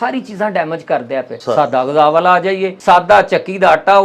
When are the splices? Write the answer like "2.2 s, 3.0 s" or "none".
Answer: 1.3 s, 2.7 s